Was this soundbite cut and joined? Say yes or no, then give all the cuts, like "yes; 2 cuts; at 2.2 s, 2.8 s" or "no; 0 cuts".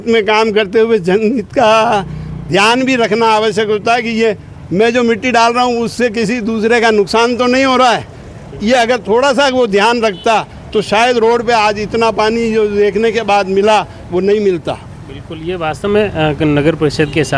no; 0 cuts